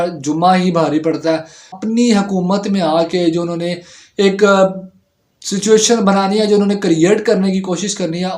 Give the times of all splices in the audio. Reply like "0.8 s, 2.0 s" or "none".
1.8 s